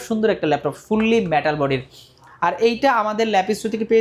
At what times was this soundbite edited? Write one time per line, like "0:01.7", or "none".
none